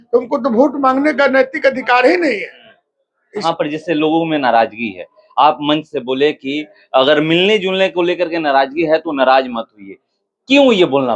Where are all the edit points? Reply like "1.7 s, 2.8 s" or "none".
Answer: 3.4 s

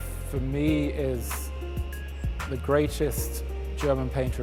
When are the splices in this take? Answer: none

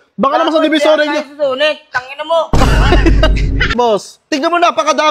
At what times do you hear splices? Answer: 3.7 s

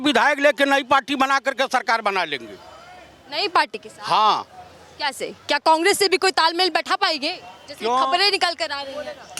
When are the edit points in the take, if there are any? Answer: none

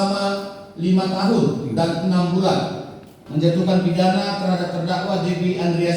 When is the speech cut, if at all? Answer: 3.2 s

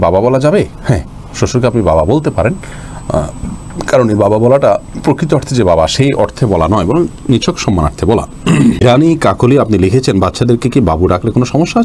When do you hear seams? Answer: none

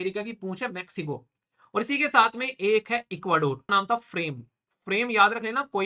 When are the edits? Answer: 3.6 s

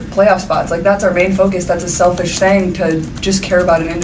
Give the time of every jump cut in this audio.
none

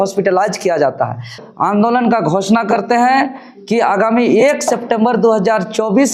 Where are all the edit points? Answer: 1.4 s

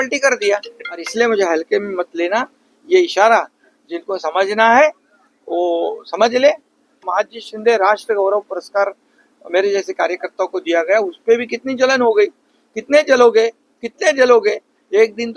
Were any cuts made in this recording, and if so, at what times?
1.1 s, 7.0 s

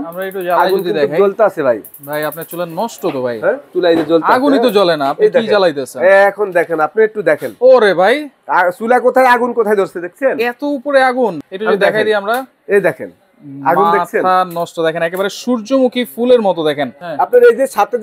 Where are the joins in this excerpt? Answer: 3.7 s, 6.9 s, 11.4 s, 16.9 s

